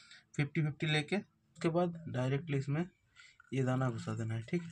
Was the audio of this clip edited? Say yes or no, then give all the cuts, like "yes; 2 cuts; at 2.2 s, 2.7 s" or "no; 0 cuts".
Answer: yes; 1 cut; at 1.4 s